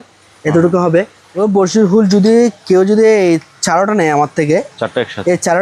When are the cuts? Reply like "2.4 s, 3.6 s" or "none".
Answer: 1.2 s